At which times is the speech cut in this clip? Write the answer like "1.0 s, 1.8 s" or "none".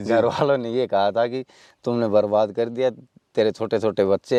none